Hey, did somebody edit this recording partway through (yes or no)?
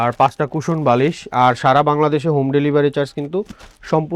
no